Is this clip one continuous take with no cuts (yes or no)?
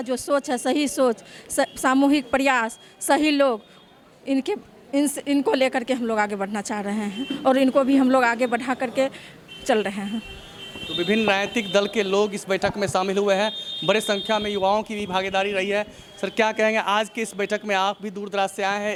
yes